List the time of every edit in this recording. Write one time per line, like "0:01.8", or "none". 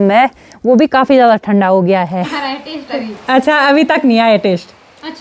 0:02.3